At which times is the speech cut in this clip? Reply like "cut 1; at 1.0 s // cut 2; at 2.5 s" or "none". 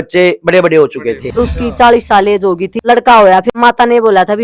cut 1; at 1.4 s // cut 2; at 2.7 s // cut 3; at 3.5 s